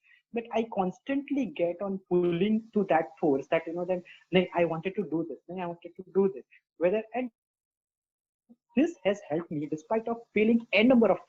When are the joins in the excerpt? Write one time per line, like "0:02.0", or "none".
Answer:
none